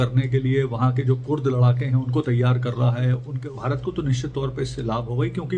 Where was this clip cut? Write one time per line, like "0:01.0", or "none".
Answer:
0:03.3